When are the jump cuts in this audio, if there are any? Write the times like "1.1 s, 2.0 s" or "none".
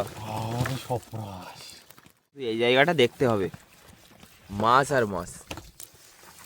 2.5 s